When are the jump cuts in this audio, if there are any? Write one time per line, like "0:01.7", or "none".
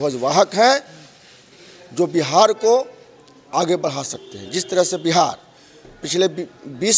none